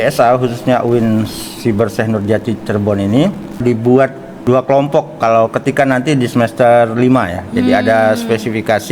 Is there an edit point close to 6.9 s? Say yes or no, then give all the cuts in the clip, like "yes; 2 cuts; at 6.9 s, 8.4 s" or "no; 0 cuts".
no; 2 cuts; at 3.6 s, 4.3 s